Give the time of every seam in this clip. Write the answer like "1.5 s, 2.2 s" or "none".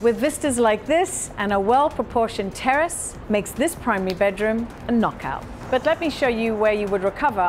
4.8 s, 5.5 s